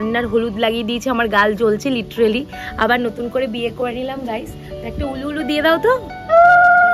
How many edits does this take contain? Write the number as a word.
zero